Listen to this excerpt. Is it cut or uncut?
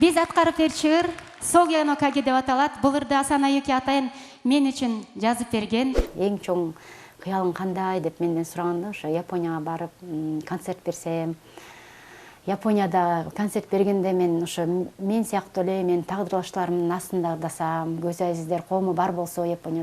cut